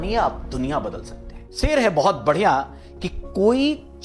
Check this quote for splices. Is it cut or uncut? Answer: cut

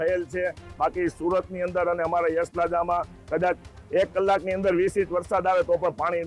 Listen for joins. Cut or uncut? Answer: uncut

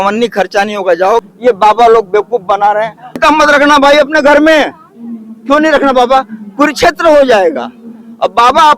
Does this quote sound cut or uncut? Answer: cut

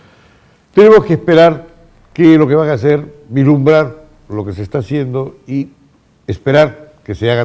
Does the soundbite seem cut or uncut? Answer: cut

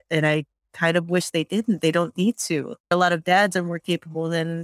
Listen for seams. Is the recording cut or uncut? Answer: cut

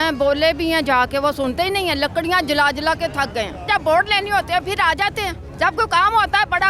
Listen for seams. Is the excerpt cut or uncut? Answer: cut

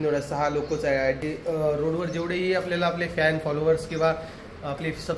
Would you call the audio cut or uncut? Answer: cut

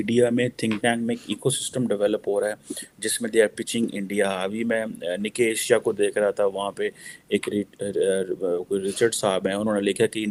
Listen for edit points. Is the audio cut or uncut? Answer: uncut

